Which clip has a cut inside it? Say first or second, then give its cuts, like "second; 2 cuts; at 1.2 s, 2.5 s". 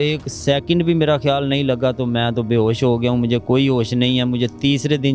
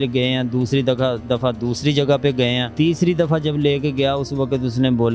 second; 1 cut; at 2.7 s